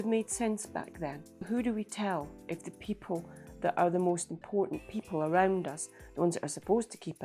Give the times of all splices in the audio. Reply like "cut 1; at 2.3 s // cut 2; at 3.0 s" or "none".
cut 1; at 1.5 s